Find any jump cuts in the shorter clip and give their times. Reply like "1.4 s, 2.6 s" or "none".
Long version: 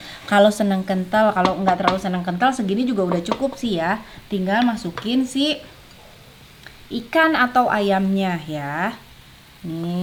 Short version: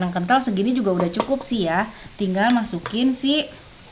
none

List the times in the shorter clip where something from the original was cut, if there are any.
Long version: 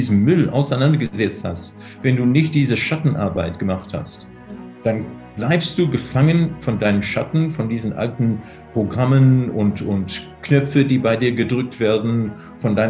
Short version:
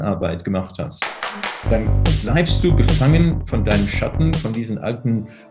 none

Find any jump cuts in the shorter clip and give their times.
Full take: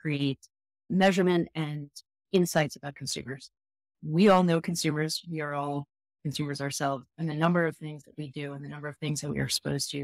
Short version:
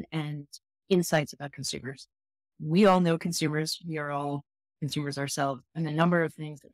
none

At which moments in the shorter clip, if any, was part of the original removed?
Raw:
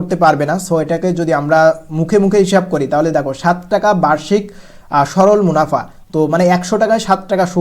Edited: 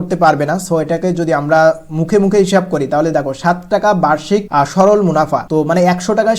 4.5 s, 5.4 s

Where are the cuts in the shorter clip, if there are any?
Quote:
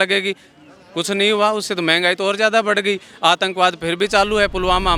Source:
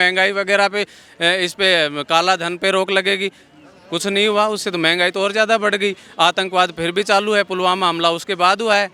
none

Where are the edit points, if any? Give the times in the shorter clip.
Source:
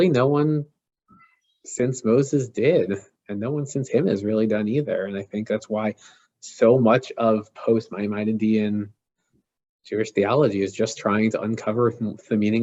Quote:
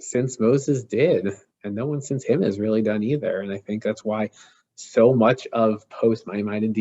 none

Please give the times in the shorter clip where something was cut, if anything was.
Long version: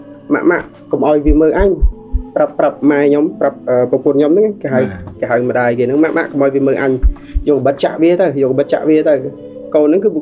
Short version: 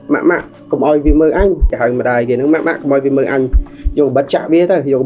1.7 s

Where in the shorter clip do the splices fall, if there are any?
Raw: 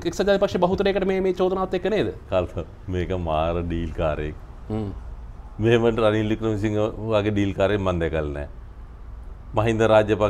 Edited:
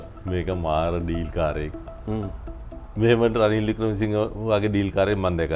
none

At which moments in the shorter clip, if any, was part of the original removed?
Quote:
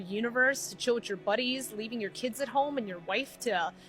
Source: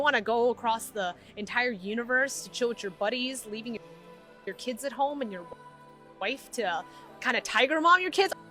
2.1 s, 3.0 s

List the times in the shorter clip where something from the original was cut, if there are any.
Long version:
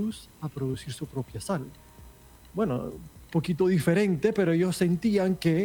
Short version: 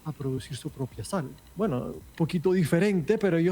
1.4 s, 2.0 s

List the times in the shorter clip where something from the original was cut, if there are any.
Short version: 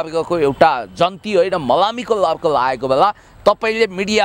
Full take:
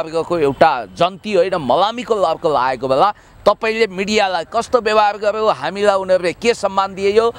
none

